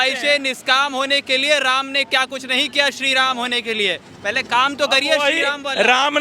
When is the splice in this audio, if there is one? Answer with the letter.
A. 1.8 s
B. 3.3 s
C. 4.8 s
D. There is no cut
D